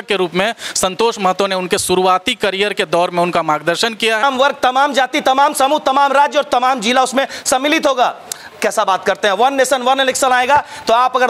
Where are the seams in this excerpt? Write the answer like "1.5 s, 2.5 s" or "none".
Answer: 4.2 s